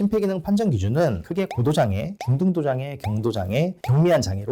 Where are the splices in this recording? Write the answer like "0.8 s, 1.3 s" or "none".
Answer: none